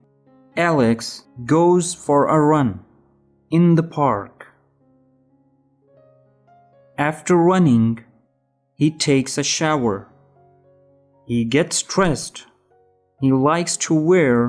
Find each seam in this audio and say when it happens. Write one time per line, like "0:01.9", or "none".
0:05.2
0:06.9